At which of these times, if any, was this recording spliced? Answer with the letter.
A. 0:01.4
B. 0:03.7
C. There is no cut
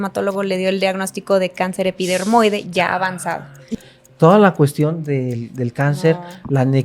B